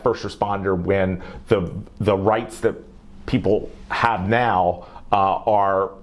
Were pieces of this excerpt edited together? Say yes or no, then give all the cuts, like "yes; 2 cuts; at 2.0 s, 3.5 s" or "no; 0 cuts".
no; 0 cuts